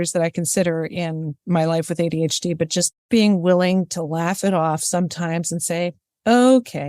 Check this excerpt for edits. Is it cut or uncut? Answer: cut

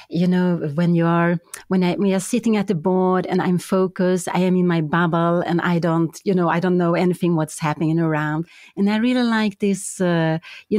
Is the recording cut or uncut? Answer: uncut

